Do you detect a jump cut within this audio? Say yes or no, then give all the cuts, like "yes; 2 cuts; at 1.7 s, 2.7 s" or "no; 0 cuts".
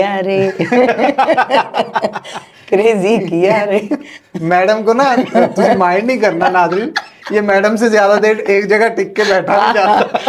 no; 0 cuts